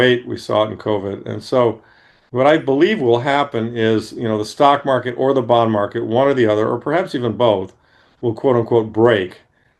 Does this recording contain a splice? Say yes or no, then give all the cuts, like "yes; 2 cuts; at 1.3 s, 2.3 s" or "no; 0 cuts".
no; 0 cuts